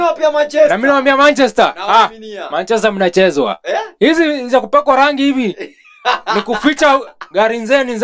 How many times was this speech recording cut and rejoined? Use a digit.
0